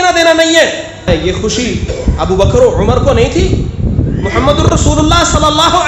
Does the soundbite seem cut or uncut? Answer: cut